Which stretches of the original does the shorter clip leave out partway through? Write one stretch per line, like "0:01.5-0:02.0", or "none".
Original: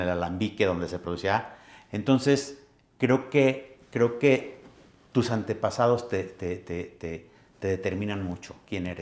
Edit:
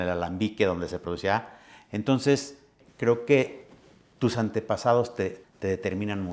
0:02.8-0:03.7
0:06.3-0:07.4